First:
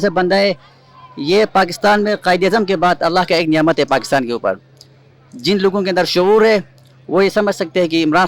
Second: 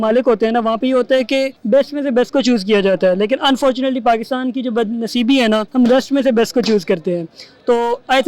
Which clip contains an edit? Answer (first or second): second